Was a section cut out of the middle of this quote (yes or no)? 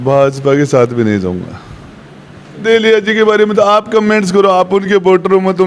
yes